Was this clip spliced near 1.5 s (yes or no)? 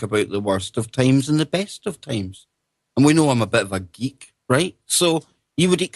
yes